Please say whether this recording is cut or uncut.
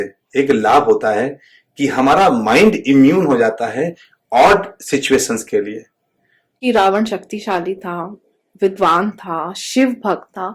cut